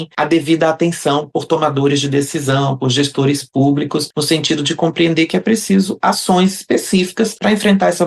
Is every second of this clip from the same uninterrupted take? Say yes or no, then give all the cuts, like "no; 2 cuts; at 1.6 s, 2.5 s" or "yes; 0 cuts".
yes; 0 cuts